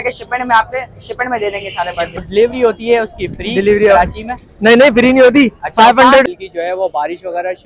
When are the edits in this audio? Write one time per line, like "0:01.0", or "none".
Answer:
0:02.2
0:06.2